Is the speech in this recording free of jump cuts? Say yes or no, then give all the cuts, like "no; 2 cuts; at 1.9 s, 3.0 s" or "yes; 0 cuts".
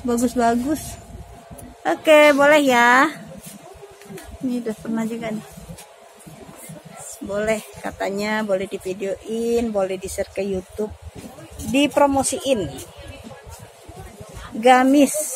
yes; 0 cuts